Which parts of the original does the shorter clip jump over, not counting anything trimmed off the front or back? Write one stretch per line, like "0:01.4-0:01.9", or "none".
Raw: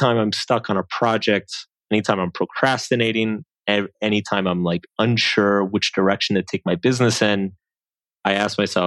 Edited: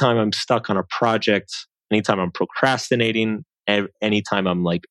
none

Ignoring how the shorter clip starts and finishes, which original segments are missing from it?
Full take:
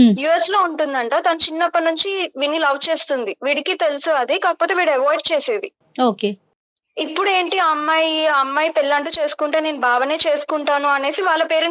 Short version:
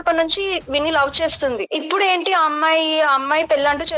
0:03.3-0:06.9

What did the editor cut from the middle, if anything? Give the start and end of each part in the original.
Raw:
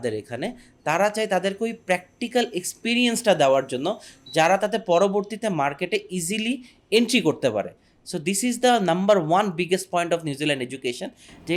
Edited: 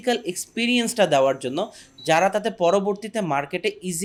none

